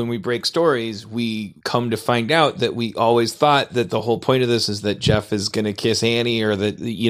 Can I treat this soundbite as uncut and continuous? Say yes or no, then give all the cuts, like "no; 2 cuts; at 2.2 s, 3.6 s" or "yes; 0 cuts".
no; 1 cut; at 1.6 s